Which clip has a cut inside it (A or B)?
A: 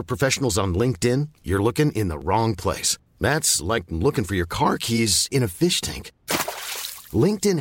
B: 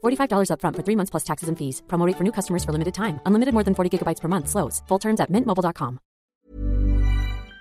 B